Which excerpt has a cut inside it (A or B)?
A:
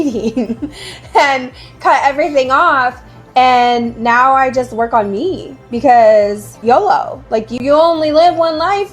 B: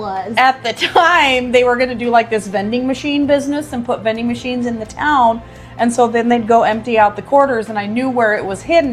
A